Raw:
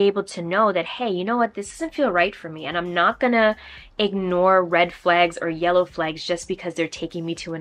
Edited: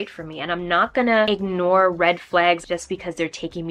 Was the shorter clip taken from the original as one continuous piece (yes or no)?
no